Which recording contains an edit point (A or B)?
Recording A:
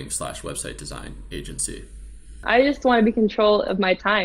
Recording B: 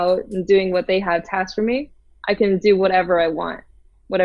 A